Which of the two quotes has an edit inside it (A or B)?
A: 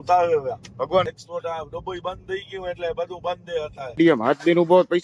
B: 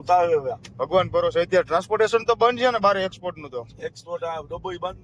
A